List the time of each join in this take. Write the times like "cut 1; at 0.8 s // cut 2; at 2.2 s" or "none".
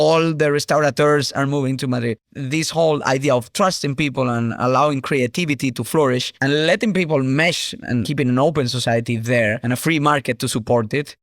cut 1; at 2.3 s